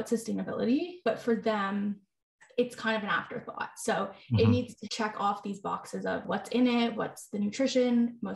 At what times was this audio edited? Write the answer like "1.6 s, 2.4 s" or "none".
0.9 s, 4.8 s, 6.3 s, 7.0 s

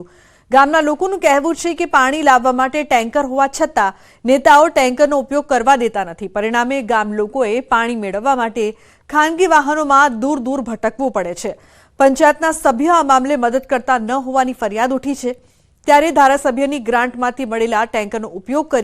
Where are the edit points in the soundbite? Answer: 14.0 s

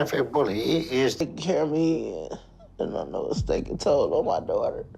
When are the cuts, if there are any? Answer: 1.2 s

